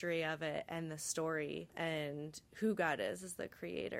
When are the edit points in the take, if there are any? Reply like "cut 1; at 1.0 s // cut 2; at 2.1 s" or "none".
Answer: cut 1; at 1.7 s